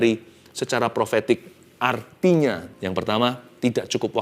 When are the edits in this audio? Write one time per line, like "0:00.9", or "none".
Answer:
0:02.7

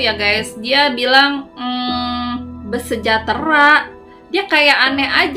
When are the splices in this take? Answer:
none

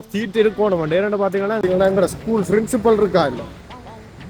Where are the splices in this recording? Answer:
0:01.6

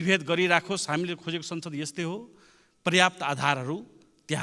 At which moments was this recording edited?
none

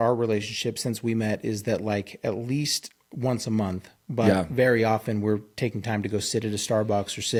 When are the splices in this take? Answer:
none

